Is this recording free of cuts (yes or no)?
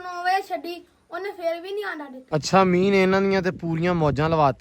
no